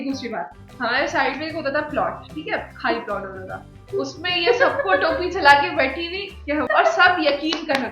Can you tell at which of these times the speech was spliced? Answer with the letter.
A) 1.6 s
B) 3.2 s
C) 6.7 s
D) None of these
C